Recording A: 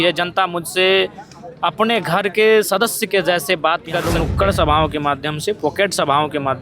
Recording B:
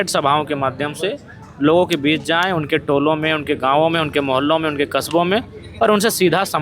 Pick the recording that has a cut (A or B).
A